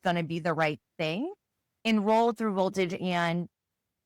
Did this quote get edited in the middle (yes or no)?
yes